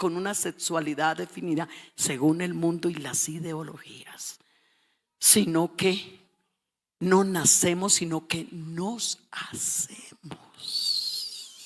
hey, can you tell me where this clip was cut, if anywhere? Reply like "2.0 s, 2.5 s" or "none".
none